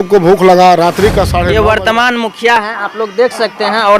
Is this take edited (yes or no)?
yes